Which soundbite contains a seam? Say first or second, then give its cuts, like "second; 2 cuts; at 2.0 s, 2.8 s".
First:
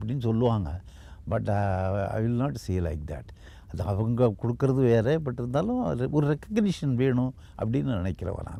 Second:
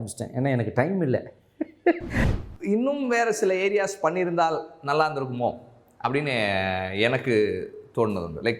second; 1 cut; at 2.2 s